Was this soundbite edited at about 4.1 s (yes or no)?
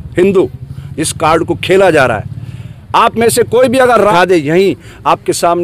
yes